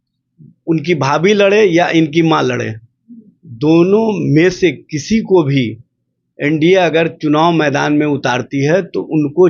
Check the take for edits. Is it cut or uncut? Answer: uncut